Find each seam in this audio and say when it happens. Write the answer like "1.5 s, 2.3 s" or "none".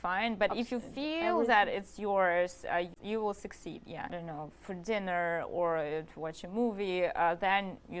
2.9 s, 4.1 s